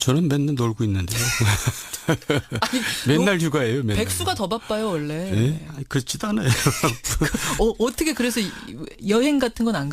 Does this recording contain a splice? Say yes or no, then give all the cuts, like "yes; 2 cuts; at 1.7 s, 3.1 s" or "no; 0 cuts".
yes; 1 cut; at 1.2 s